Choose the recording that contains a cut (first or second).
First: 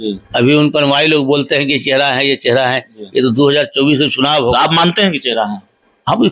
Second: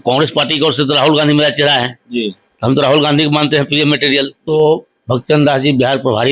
second